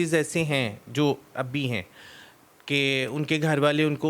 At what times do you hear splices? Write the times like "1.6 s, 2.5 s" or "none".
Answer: none